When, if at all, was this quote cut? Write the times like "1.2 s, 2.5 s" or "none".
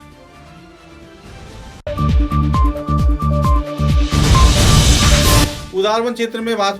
5.5 s